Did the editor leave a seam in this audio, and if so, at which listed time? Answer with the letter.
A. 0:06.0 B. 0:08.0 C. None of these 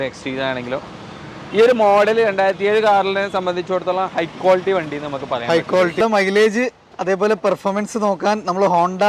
A